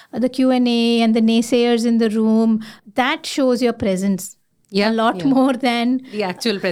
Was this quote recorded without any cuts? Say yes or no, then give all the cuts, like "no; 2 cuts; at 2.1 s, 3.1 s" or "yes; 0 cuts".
no; 1 cut; at 2.8 s